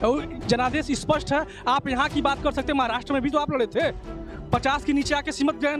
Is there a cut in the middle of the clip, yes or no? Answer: no